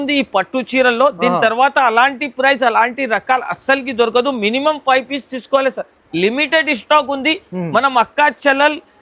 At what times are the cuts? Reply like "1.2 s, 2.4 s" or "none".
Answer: none